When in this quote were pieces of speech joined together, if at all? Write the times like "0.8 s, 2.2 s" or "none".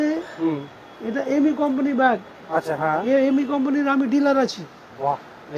none

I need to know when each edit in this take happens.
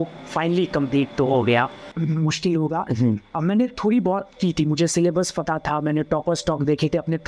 1.9 s

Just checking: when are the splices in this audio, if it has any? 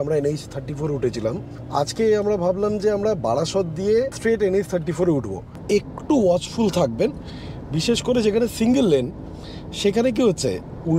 1.5 s, 4.1 s, 5.5 s

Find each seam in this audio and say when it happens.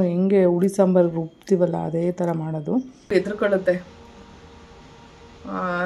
3.1 s

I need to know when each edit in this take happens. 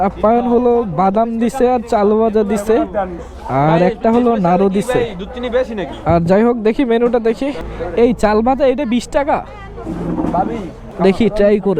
none

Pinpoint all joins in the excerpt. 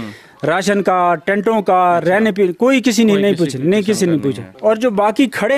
none

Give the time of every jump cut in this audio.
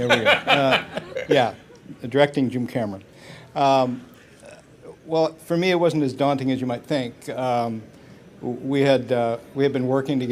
9.1 s

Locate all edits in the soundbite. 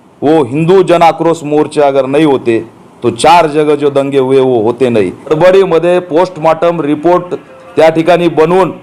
5.3 s

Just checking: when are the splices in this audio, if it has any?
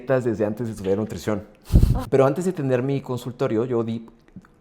2.0 s

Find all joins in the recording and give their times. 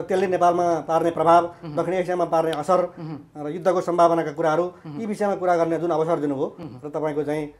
none

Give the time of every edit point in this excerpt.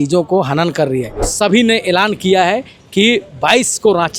1.3 s

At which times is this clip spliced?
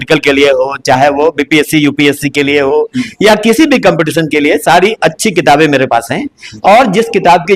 none

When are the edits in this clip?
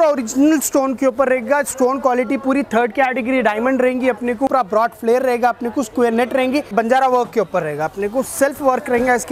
4.5 s, 6.7 s

